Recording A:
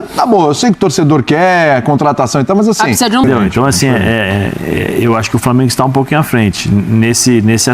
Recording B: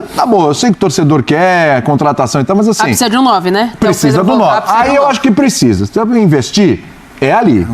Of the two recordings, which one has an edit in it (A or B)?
A